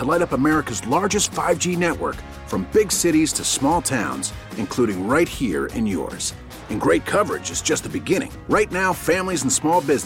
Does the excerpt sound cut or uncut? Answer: uncut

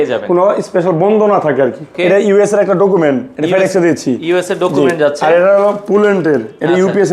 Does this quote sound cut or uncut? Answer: cut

